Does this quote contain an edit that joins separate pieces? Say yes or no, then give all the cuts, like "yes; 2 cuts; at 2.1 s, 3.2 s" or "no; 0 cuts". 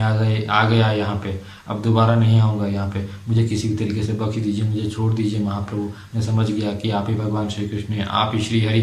no; 0 cuts